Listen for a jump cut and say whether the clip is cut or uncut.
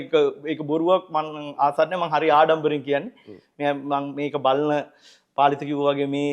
uncut